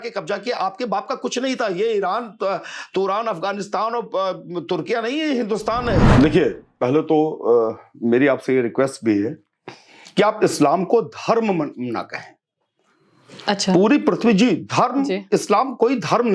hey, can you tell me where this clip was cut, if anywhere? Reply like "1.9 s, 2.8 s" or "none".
6.1 s